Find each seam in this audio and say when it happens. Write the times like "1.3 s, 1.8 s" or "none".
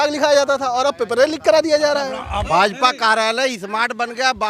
2.4 s